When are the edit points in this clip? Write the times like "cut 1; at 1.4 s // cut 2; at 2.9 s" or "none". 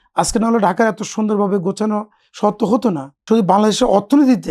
cut 1; at 3.1 s